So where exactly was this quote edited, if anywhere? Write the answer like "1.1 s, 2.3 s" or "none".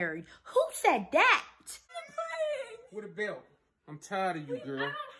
1.8 s